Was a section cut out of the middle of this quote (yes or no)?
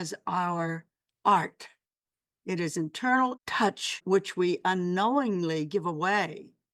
yes